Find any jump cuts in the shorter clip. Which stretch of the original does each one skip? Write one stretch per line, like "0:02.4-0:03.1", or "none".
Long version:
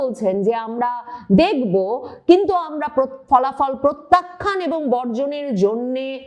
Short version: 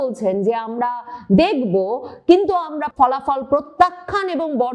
0:02.8-0:03.2